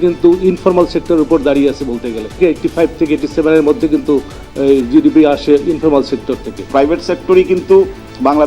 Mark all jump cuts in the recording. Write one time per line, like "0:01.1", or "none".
0:02.4
0:06.6